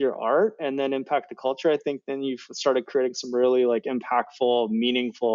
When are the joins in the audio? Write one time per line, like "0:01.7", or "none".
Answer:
none